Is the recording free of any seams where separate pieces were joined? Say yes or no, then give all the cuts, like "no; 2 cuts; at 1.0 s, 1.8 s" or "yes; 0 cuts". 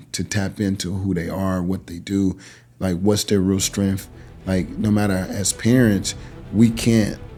yes; 0 cuts